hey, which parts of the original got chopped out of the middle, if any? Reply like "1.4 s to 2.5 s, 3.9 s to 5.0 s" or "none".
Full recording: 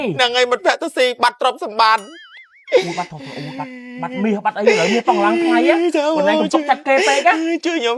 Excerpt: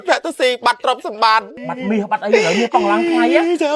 2.2 s to 3.9 s